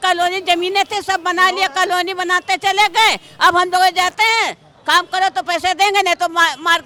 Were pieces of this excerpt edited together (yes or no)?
no